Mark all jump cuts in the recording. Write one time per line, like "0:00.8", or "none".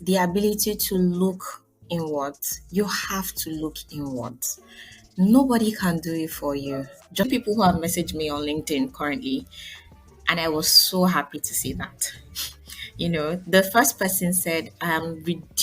0:07.2